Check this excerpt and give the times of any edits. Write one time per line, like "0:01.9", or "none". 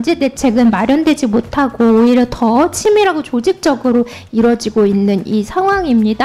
none